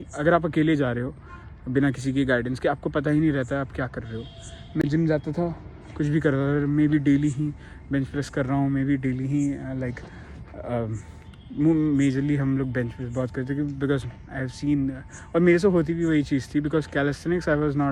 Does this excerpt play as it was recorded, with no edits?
yes; 0 cuts

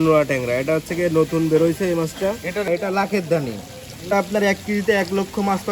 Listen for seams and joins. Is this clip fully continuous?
no; 2 cuts; at 2.7 s, 4.1 s

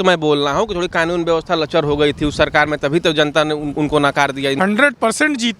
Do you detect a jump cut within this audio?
yes; 1 cut; at 4.6 s

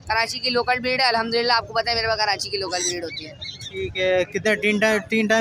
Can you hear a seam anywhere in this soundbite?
no; 0 cuts

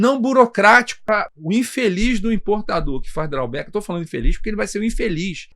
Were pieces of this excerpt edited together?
yes; 1 cut; at 1.1 s

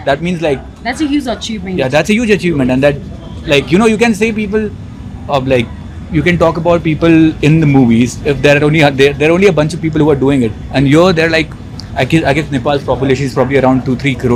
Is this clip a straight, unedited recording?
yes; 0 cuts

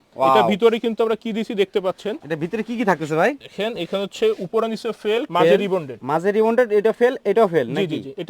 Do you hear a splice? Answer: no; 0 cuts

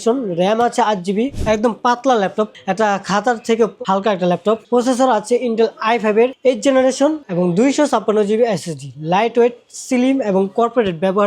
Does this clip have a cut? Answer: yes; 3 cuts; at 1.4 s, 4.6 s, 7.2 s

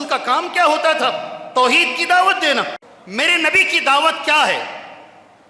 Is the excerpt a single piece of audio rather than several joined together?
no; 1 cut; at 2.8 s

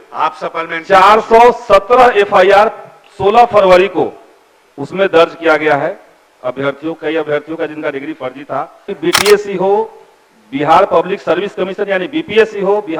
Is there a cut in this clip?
yes; 1 cut; at 8.9 s

